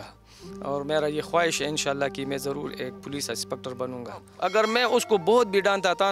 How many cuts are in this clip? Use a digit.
1